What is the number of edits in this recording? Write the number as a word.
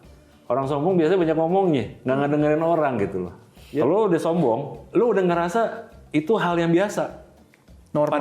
one